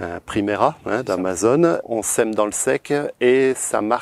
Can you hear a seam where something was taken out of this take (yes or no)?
yes